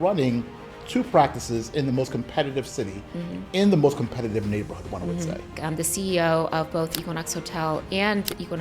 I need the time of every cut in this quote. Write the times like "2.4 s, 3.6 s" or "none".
5.5 s